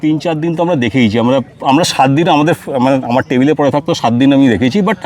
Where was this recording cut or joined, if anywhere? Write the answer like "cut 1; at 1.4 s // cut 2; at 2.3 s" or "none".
none

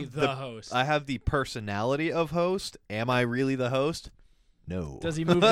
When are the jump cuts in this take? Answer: none

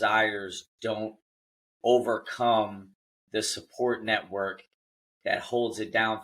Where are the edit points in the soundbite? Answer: none

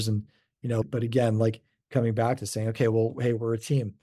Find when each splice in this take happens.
cut 1; at 0.9 s // cut 2; at 1.7 s

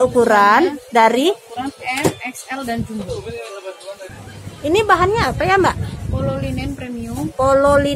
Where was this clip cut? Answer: cut 1; at 4.1 s

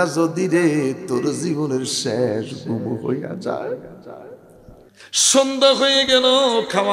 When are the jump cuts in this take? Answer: cut 1; at 4.8 s

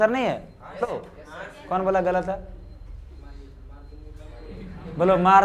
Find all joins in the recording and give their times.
cut 1; at 0.9 s

